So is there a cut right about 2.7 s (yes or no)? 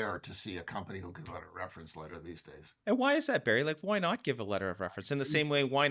yes